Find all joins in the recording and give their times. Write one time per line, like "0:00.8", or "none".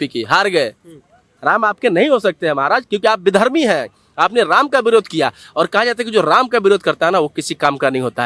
0:01.2